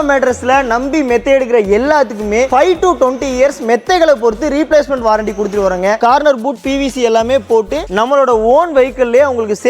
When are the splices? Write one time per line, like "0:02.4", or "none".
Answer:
0:06.0